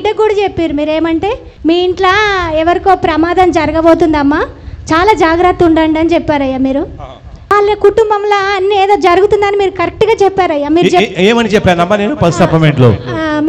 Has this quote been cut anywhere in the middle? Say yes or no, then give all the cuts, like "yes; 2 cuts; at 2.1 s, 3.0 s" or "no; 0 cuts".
yes; 2 cuts; at 1.5 s, 7.4 s